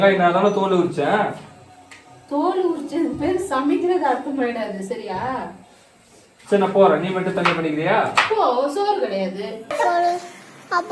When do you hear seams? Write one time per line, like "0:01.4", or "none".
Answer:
0:09.6